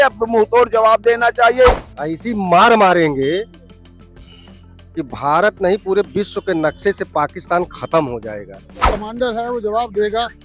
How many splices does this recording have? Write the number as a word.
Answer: two